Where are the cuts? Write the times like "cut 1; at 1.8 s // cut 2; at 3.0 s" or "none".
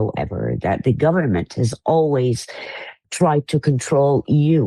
cut 1; at 3.0 s